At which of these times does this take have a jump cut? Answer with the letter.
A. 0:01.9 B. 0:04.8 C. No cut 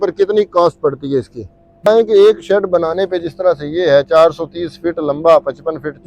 A